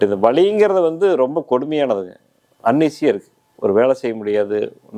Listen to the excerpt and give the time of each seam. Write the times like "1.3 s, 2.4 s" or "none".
none